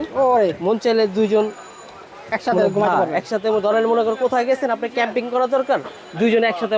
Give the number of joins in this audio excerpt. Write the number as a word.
zero